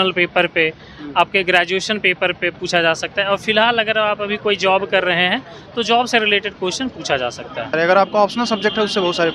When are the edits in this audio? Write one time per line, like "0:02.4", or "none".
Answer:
0:07.7